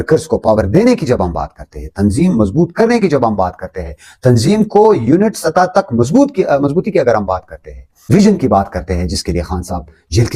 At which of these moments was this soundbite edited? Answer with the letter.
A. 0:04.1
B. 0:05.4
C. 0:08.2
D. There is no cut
C